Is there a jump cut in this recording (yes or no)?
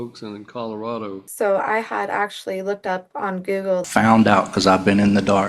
yes